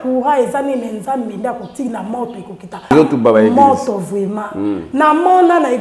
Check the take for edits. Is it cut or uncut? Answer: uncut